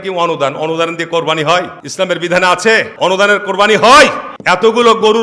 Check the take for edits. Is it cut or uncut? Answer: cut